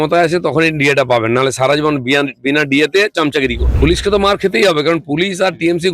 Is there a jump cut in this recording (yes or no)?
yes